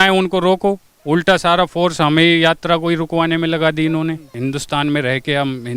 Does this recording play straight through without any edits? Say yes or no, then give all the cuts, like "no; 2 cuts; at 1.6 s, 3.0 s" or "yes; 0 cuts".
no; 2 cuts; at 0.9 s, 4.3 s